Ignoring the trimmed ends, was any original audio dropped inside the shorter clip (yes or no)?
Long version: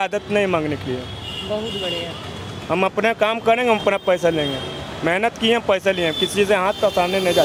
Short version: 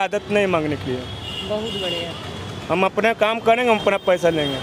no